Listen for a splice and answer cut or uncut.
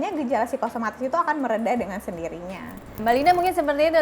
cut